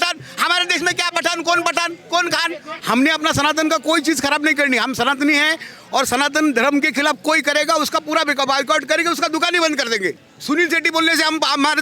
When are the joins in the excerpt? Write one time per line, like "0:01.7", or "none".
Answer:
0:02.7
0:10.3